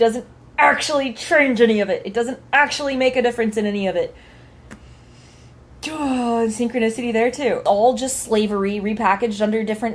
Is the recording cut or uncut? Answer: cut